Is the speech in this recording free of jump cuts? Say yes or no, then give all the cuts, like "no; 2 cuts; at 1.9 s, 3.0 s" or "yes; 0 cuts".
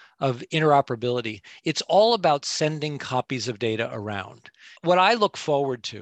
no; 1 cut; at 4.6 s